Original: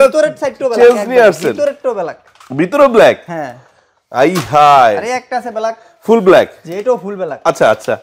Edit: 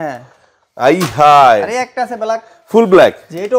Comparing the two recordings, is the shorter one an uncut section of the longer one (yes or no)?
yes